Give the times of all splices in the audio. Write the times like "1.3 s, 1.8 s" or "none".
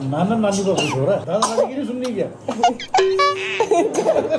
none